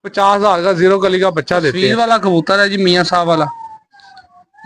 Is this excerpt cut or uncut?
cut